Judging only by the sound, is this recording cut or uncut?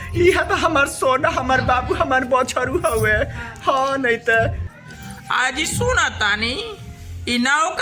cut